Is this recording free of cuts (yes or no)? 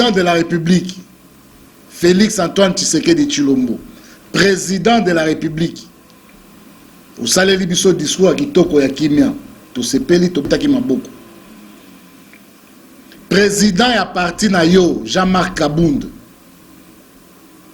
no